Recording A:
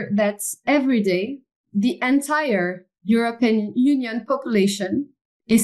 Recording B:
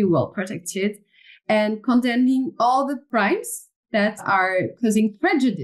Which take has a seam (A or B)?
B